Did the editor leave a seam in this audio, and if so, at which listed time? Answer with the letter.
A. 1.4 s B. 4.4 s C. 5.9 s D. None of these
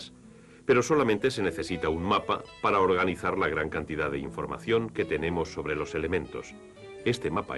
B